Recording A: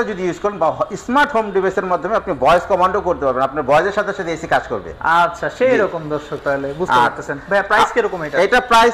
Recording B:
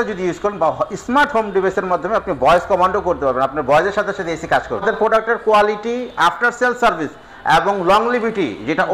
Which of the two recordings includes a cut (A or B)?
B